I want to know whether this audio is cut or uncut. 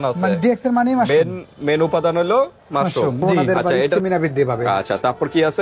cut